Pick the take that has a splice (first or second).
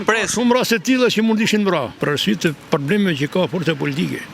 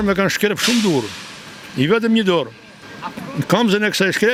first